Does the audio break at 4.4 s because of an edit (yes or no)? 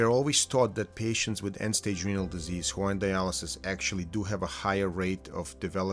no